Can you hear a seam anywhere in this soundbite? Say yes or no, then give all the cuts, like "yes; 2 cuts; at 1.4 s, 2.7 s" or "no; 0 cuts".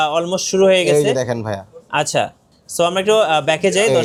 no; 0 cuts